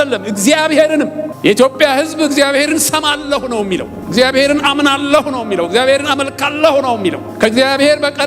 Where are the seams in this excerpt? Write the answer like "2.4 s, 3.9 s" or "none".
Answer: 1.3 s, 4.0 s, 7.3 s